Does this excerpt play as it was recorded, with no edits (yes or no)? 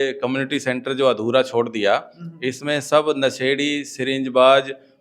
yes